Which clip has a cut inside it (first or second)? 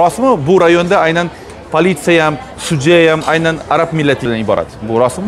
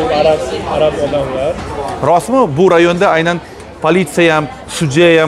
first